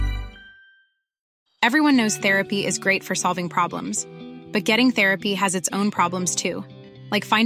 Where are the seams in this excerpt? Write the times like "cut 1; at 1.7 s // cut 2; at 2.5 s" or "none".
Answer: cut 1; at 1.2 s

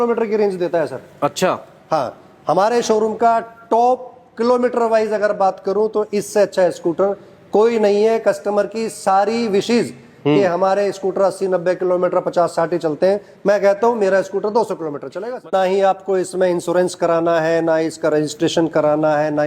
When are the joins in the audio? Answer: cut 1; at 15.4 s

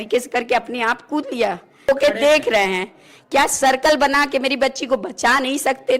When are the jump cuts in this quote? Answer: cut 1; at 1.9 s

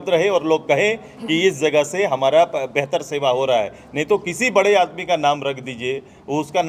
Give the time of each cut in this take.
none

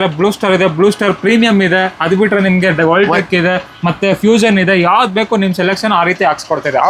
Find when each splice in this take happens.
none

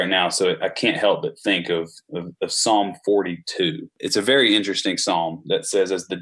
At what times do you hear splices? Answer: cut 1; at 4.0 s

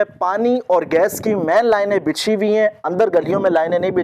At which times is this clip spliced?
none

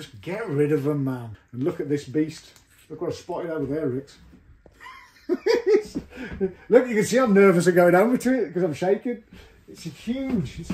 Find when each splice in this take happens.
cut 1; at 1.4 s

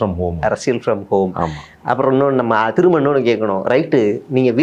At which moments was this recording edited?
none

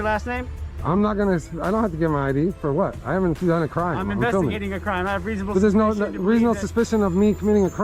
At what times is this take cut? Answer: none

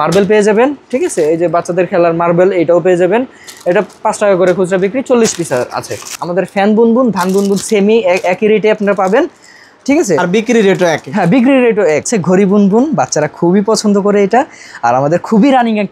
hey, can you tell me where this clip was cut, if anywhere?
cut 1; at 6.2 s // cut 2; at 12.1 s

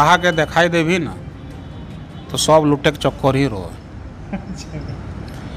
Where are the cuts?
none

